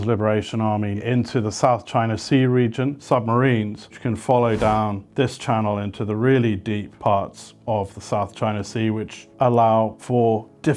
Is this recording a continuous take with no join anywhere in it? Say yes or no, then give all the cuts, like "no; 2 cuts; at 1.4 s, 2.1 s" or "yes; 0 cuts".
yes; 0 cuts